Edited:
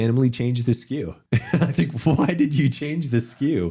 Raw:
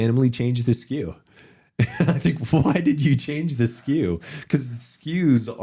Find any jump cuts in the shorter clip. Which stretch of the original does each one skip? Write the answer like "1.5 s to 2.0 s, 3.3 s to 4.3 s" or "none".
1.2 s to 1.6 s